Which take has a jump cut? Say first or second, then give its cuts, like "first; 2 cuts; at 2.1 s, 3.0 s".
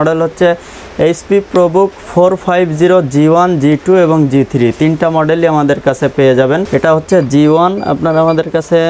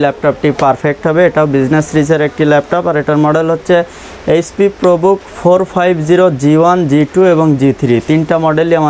first; 1 cut; at 6.6 s